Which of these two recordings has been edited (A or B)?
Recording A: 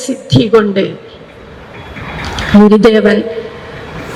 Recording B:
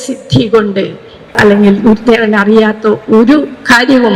B